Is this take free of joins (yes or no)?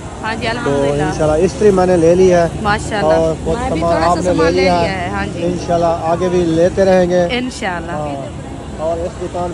yes